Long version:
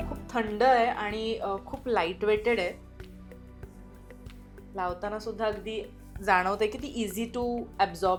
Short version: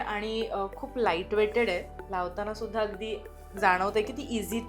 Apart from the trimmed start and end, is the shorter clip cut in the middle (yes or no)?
yes